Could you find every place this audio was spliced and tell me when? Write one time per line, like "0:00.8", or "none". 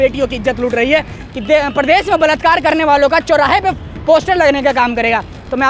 0:01.2